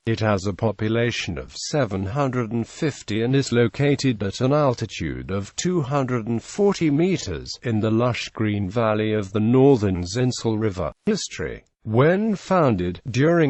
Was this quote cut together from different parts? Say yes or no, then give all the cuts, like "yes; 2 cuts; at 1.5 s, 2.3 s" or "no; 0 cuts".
yes; 1 cut; at 6.9 s